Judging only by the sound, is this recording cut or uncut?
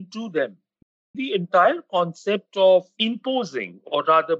cut